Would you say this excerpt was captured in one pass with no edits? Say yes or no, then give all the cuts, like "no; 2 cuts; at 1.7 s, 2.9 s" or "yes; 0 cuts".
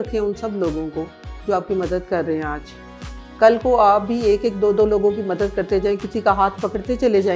yes; 0 cuts